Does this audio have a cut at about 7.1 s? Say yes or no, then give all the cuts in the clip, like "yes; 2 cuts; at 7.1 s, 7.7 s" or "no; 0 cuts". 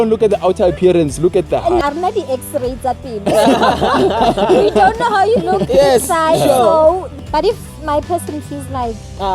yes; 2 cuts; at 1.8 s, 7.1 s